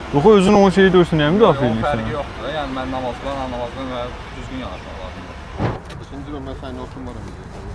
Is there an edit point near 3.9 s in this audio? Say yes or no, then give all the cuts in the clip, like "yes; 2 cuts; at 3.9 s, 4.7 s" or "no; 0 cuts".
no; 1 cut; at 5.7 s